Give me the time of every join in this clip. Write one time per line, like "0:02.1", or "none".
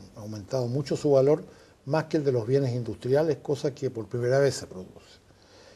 0:02.0